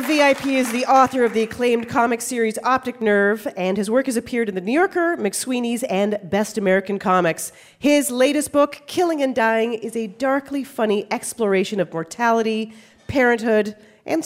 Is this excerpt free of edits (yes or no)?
yes